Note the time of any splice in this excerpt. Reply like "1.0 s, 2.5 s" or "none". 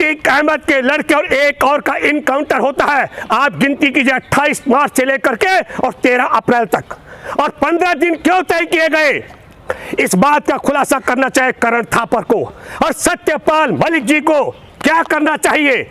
none